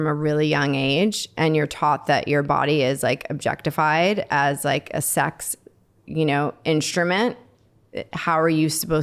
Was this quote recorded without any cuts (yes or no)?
yes